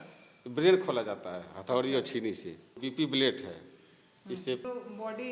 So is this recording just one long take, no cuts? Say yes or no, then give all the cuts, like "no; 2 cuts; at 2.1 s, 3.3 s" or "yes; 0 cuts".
no; 2 cuts; at 2.8 s, 4.6 s